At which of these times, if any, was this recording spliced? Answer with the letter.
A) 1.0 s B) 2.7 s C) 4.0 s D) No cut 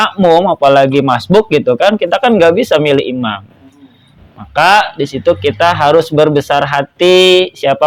D